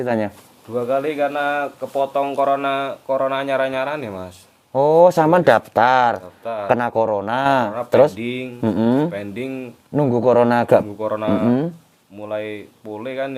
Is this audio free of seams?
yes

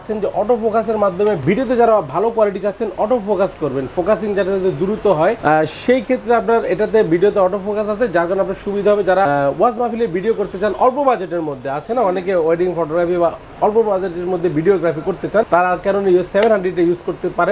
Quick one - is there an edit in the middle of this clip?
no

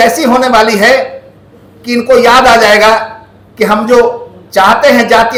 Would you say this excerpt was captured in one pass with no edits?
yes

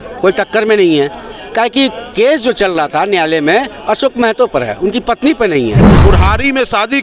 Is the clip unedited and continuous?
no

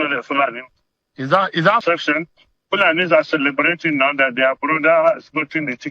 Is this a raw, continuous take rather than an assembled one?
no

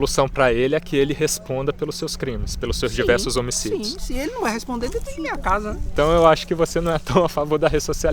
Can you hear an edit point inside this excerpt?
yes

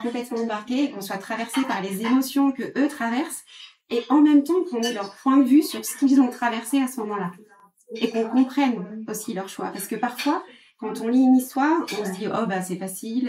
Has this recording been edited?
no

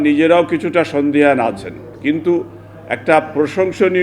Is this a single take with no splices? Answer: yes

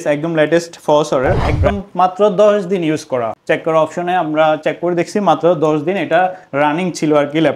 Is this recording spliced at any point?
yes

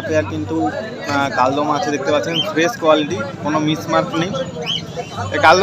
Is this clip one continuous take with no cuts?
yes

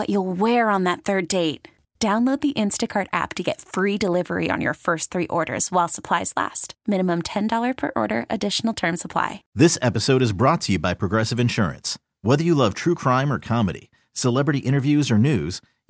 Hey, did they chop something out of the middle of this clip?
yes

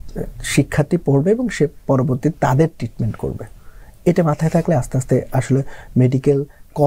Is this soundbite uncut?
yes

